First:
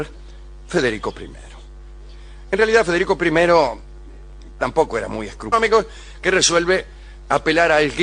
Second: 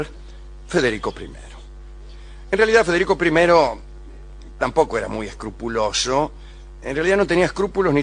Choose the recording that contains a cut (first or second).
second